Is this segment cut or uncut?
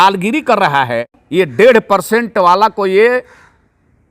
cut